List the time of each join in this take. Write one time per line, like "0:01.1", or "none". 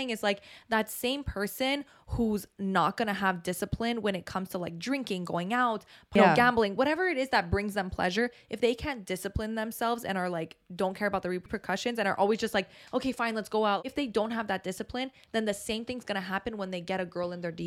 0:06.2
0:11.5
0:13.9